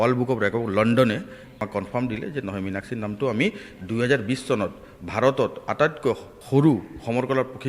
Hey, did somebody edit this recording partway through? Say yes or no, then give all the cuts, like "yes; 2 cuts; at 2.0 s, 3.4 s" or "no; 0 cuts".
yes; 2 cuts; at 1.6 s, 6.3 s